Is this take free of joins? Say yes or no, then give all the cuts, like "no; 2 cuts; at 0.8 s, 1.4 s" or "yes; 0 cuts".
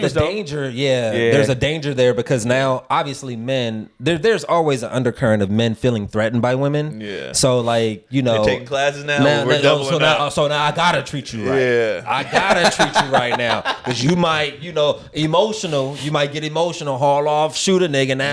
yes; 0 cuts